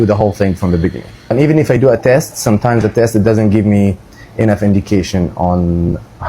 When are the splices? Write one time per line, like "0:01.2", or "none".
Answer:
0:01.3

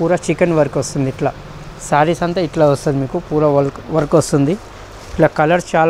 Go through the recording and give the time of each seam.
none

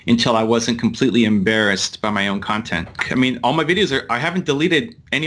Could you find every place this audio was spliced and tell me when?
0:02.9

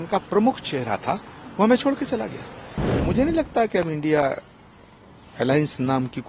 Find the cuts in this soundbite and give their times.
0:02.9

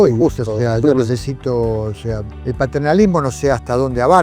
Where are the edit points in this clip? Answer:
0:02.3

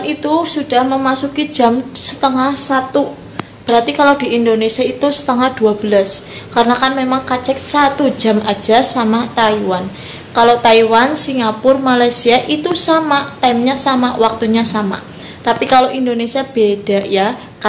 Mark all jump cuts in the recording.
none

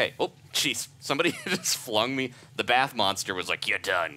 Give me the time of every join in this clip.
none

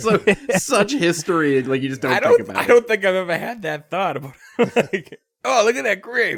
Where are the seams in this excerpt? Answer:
none

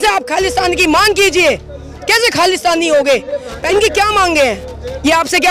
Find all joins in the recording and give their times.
0:03.5

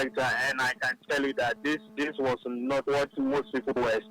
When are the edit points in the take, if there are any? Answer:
0:01.6
0:02.8

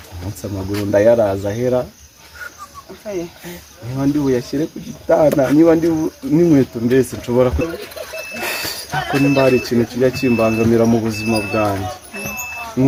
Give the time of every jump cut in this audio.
none

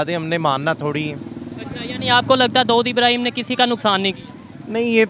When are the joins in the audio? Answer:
none

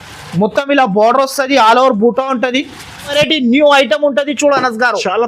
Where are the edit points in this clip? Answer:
0:03.1

